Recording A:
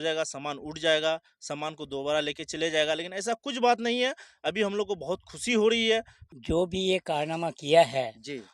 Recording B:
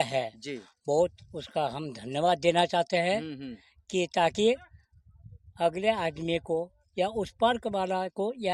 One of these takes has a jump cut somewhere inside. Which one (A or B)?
A